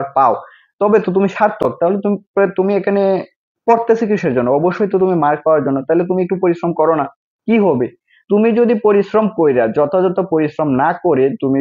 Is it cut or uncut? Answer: uncut